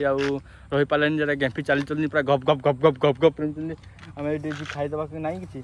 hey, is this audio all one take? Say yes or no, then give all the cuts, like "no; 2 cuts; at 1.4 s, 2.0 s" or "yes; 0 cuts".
yes; 0 cuts